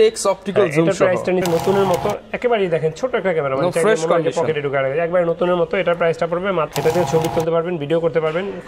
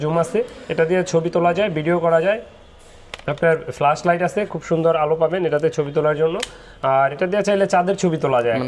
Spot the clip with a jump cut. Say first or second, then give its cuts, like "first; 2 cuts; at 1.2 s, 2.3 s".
first; 2 cuts; at 1.5 s, 6.7 s